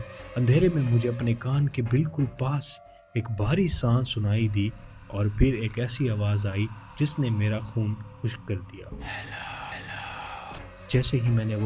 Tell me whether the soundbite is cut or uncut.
cut